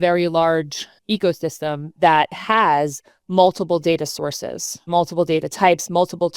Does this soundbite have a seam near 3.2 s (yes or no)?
no